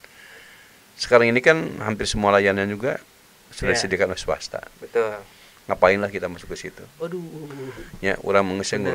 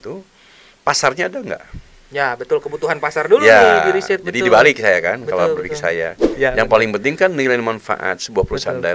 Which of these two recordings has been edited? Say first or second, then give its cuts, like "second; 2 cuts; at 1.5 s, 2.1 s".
second; 1 cut; at 6.2 s